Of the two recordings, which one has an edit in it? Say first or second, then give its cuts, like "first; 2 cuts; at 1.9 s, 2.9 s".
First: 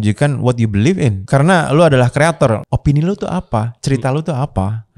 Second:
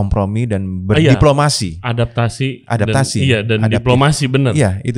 first; 2 cuts; at 1.2 s, 2.6 s